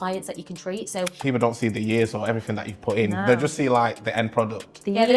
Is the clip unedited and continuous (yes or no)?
no